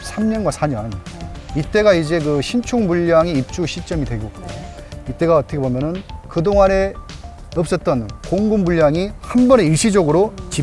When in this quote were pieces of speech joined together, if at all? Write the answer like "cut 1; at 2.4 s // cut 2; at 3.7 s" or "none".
none